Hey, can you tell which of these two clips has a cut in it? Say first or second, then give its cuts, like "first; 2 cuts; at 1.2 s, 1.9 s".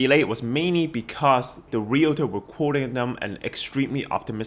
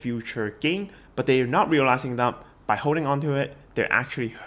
first; 1 cut; at 1.6 s